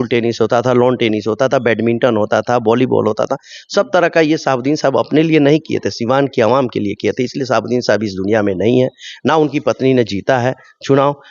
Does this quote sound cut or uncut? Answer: uncut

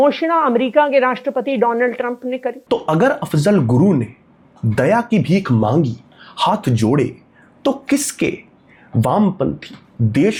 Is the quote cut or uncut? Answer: uncut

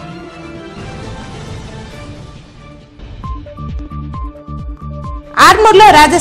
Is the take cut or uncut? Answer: uncut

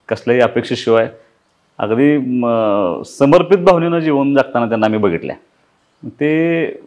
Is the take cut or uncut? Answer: uncut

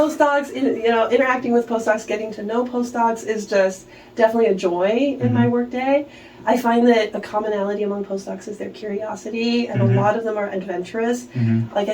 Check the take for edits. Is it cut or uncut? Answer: uncut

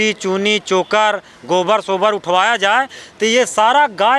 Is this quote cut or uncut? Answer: uncut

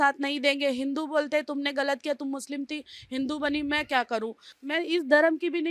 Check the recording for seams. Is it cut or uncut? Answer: cut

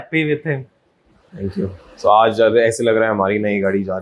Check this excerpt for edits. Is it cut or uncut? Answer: uncut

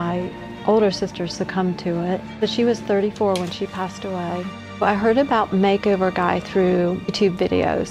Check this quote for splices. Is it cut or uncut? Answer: cut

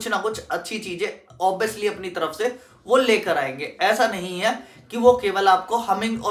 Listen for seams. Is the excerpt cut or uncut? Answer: uncut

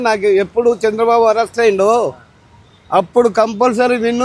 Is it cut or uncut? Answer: uncut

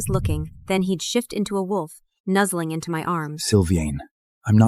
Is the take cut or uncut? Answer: uncut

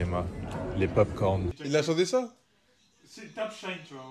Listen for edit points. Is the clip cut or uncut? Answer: cut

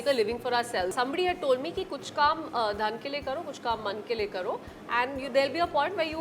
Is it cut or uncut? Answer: uncut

